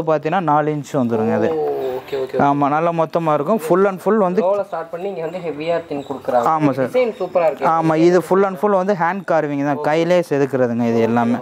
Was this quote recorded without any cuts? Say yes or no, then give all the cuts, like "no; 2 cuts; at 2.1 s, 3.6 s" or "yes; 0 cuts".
yes; 0 cuts